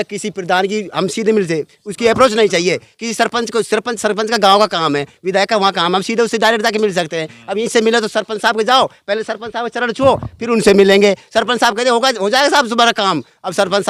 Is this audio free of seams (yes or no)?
yes